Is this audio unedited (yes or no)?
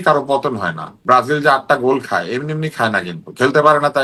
yes